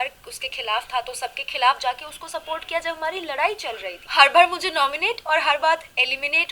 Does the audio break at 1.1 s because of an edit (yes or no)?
no